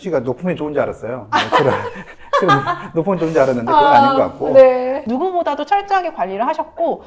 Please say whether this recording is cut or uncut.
cut